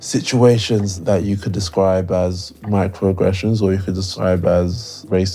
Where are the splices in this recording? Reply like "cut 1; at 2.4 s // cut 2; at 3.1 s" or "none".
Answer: cut 1; at 4.0 s